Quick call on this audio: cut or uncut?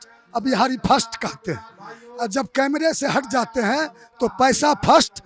uncut